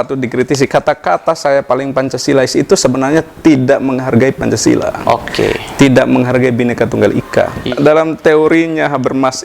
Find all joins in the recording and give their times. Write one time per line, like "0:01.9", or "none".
0:07.7